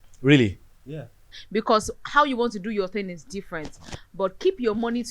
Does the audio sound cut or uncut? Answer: cut